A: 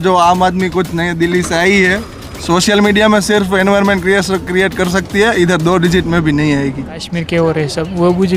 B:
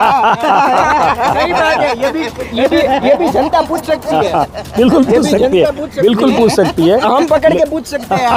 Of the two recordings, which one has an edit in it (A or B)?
A